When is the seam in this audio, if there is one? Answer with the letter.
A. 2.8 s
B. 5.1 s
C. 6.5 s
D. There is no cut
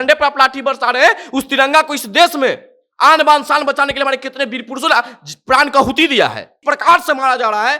C